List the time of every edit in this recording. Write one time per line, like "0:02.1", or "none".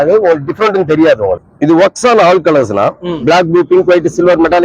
0:01.5